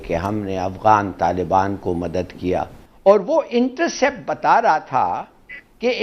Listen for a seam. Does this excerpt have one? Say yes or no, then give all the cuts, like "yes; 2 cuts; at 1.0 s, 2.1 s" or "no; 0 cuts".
yes; 1 cut; at 2.8 s